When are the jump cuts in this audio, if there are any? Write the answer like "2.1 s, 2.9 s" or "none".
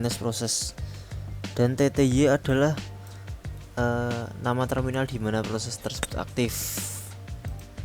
6.6 s